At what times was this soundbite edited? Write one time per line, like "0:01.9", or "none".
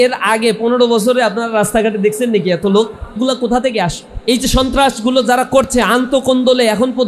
0:03.2
0:04.1